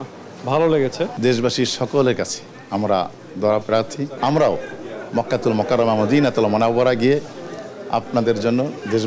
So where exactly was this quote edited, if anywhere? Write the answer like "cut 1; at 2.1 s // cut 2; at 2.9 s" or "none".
cut 1; at 1.1 s // cut 2; at 4.0 s